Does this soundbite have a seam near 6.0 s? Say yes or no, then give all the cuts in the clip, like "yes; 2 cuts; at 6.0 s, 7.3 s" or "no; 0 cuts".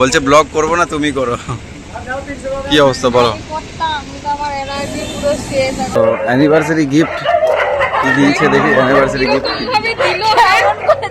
yes; 1 cut; at 6.0 s